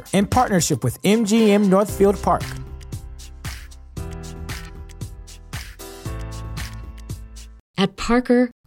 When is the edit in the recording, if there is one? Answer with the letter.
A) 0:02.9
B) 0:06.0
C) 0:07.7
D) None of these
C